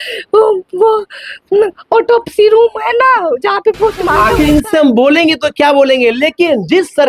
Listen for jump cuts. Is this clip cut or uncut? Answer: cut